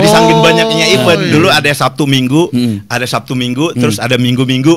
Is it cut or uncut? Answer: uncut